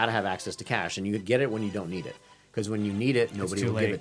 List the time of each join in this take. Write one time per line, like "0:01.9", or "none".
none